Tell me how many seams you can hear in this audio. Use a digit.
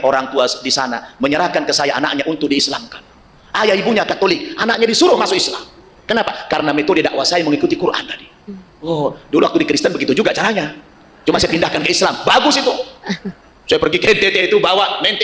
0